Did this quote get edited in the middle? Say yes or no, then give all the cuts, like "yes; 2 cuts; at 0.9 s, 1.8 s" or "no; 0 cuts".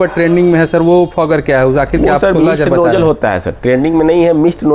no; 0 cuts